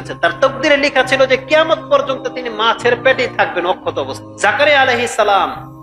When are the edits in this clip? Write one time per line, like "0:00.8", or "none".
0:04.2